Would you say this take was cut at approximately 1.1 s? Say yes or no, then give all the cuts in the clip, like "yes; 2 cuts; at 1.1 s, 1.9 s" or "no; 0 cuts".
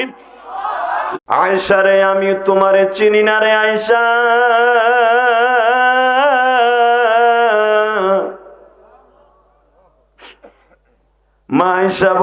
yes; 1 cut; at 1.1 s